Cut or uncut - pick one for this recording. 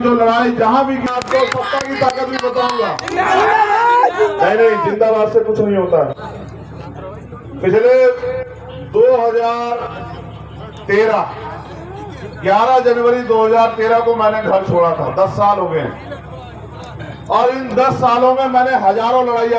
cut